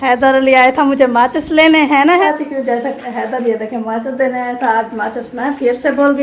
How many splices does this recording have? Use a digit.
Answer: 1